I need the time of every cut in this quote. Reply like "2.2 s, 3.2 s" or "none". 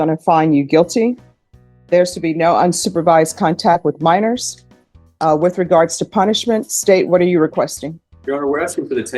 none